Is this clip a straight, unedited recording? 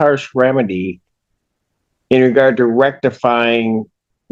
yes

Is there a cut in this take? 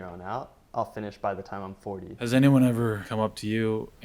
yes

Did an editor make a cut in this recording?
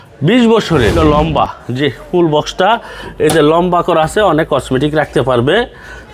yes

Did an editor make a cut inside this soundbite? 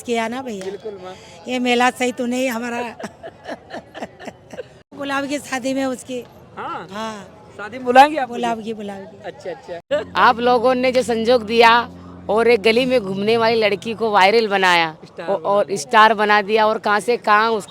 yes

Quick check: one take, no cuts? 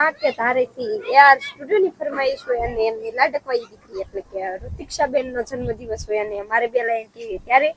yes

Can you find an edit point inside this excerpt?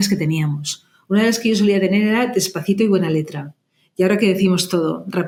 no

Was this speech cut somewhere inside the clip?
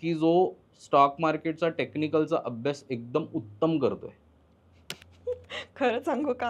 no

